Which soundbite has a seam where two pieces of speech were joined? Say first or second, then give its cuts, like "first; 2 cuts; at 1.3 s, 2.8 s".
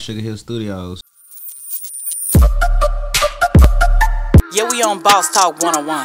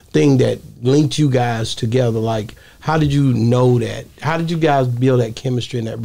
first; 1 cut; at 1.1 s